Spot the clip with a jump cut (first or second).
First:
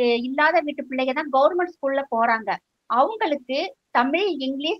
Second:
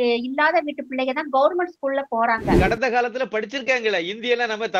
second